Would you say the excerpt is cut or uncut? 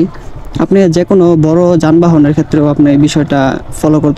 uncut